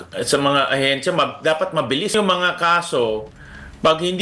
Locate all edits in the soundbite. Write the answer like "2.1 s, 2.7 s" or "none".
2.1 s